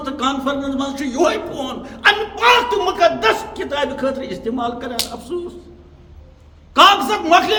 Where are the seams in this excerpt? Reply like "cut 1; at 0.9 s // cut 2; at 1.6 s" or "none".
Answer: none